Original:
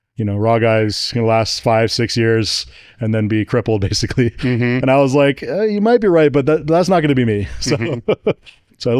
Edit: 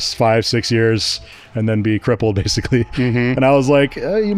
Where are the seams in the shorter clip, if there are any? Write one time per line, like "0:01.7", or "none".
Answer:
none